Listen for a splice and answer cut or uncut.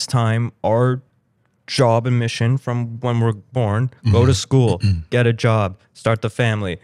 uncut